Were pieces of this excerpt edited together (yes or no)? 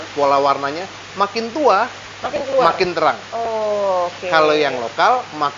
no